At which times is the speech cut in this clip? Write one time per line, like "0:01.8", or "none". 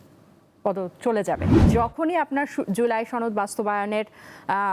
0:01.6

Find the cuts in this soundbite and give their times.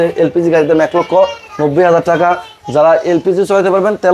none

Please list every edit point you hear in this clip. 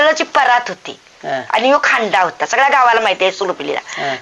none

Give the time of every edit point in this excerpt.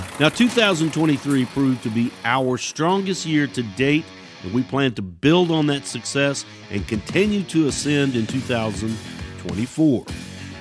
none

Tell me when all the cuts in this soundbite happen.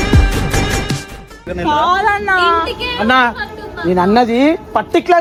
none

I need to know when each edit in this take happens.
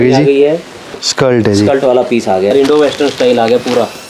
0:00.9
0:02.5

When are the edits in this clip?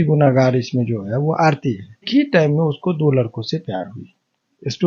0:02.1

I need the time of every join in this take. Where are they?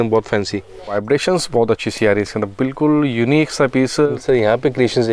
0:00.9
0:04.1

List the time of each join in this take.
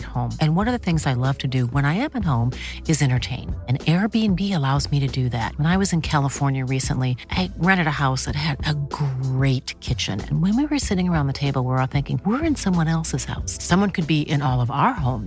none

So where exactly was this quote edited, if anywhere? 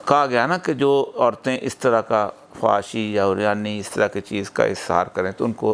none

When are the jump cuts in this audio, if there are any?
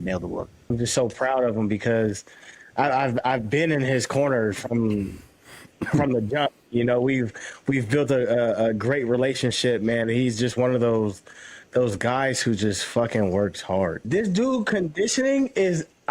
0:00.7
0:14.0

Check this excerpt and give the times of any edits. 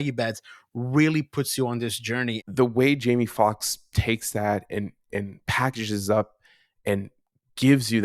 0:02.4

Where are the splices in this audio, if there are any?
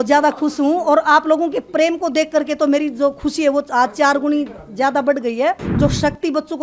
0:05.7

